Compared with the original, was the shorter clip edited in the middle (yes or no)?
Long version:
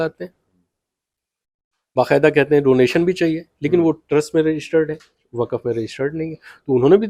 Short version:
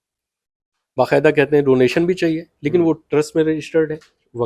no